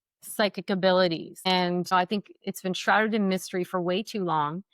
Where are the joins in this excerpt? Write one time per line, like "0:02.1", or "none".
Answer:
0:01.7